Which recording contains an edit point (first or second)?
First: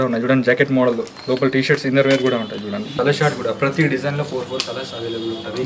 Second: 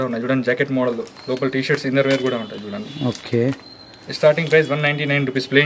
first